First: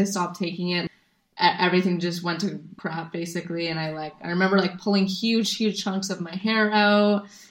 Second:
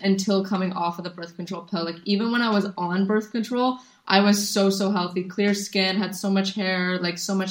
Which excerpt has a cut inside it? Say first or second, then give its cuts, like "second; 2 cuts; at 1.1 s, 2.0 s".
first; 2 cuts; at 0.8 s, 2.7 s